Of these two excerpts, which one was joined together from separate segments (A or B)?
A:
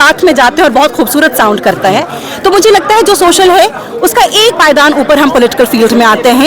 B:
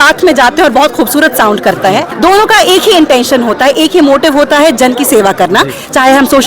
B